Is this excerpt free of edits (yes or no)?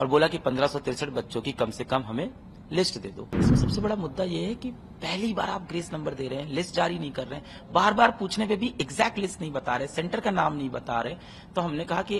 no